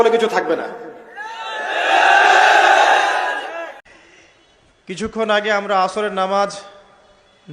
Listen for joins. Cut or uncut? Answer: cut